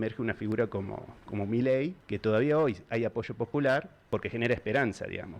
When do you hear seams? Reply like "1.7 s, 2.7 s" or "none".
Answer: 2.0 s, 4.0 s